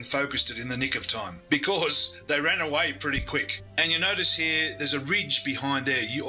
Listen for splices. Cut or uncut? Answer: uncut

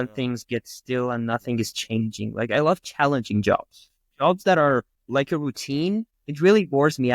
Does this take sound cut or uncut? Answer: uncut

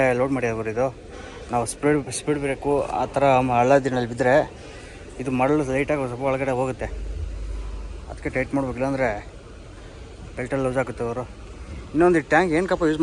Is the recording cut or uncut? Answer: uncut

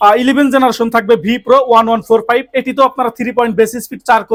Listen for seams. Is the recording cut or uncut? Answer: uncut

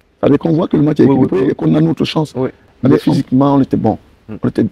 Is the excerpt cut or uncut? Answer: cut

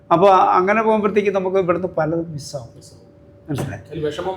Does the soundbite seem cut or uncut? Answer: uncut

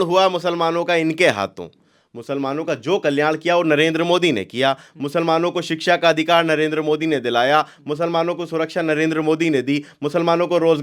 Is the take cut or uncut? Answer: uncut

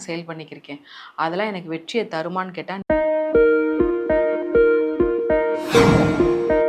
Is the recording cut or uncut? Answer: cut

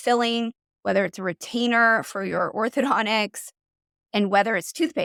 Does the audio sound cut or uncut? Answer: uncut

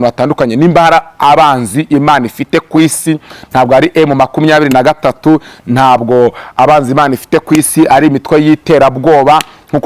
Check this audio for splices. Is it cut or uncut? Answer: uncut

